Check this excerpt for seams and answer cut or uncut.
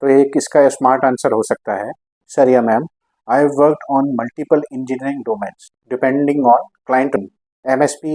cut